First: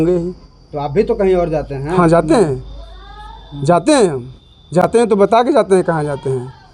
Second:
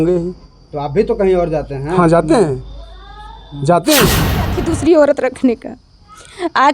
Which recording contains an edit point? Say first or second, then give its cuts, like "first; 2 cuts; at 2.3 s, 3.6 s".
second; 1 cut; at 4.6 s